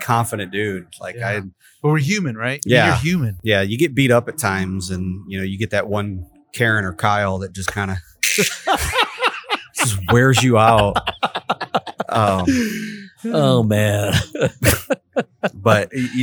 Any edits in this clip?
yes; 1 cut; at 1.6 s

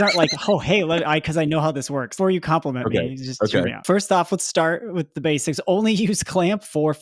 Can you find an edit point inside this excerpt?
yes; 2 cuts; at 2.1 s, 3.8 s

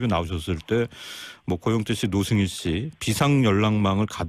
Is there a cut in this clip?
yes; 1 cut; at 2.3 s

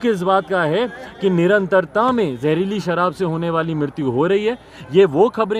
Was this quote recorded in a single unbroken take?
yes; 0 cuts

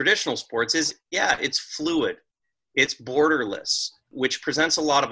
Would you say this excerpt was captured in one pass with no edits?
no; 2 cuts; at 1.0 s, 4.0 s

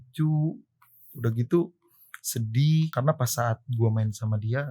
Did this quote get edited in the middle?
yes; 1 cut; at 2.9 s

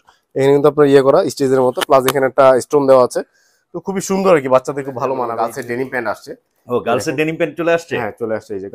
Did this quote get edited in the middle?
yes; 1 cut; at 5.3 s

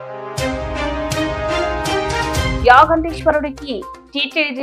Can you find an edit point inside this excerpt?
no; 0 cuts

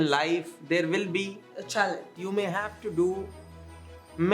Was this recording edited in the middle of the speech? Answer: yes; 1 cut; at 2.1 s

